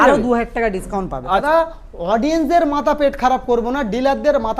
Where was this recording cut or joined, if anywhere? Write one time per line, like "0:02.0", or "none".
0:01.4